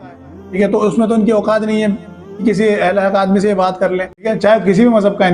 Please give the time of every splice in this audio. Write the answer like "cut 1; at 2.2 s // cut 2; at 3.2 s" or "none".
cut 1; at 4.3 s

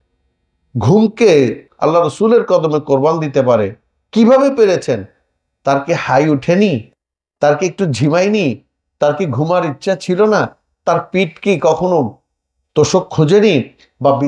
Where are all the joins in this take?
cut 1; at 1.6 s

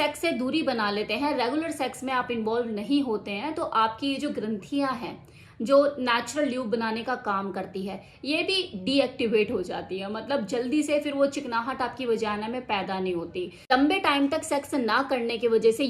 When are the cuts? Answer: cut 1; at 13.6 s

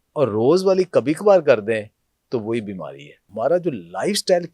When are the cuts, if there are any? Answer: cut 1; at 3.2 s

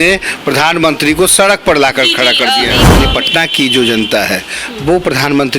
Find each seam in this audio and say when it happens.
cut 1; at 2.9 s

